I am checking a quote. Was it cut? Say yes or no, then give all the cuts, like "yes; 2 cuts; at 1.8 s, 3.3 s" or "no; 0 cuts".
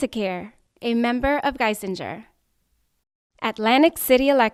no; 0 cuts